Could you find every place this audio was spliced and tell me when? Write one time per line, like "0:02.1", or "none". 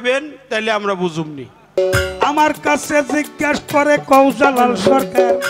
0:01.8